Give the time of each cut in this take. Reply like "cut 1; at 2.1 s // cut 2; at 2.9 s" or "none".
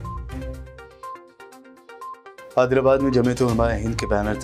cut 1; at 2.1 s